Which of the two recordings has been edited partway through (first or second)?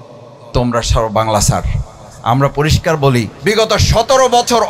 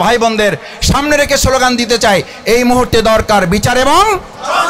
first